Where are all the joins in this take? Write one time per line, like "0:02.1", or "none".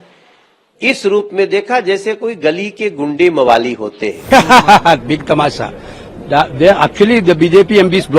0:04.1